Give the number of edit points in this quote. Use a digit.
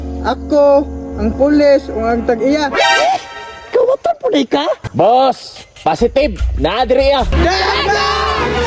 2